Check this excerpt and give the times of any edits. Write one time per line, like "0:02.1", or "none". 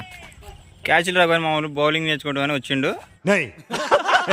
0:03.1